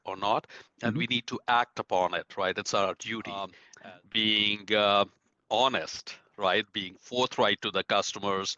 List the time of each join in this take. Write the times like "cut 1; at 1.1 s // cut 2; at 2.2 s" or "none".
cut 1; at 3.6 s